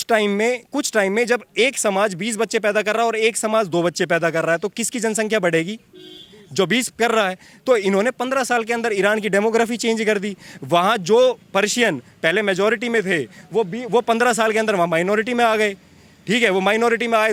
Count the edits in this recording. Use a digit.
0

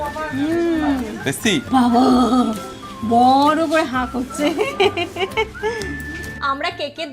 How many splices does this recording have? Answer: 1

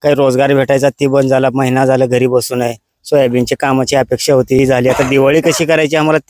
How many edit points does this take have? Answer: 1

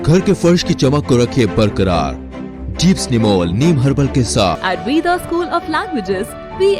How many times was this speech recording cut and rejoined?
1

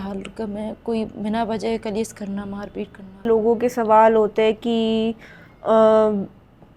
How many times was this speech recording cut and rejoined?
1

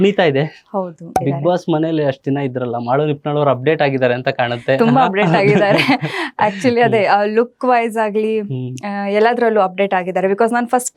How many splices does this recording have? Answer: 1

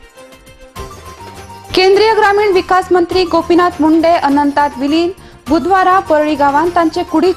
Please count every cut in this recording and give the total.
2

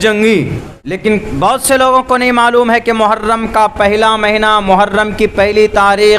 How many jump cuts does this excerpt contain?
1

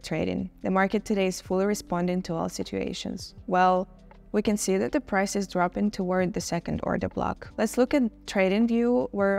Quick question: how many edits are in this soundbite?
2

